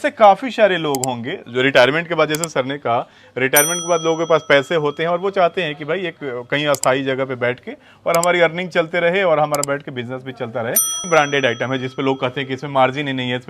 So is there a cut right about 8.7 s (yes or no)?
no